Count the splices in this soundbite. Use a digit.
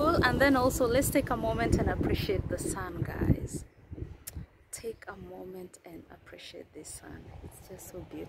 0